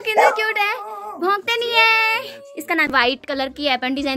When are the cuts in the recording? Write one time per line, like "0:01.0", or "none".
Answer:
0:02.9